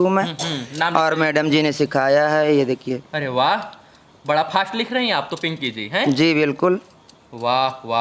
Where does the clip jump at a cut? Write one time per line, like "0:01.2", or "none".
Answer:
none